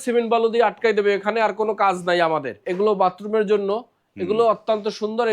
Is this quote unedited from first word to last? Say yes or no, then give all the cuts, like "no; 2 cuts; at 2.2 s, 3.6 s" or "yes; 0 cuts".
no; 1 cut; at 2.6 s